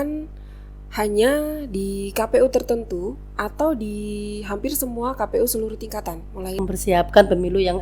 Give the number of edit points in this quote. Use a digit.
1